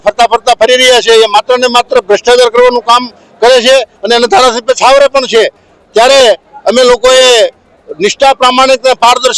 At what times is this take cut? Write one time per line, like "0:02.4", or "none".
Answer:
none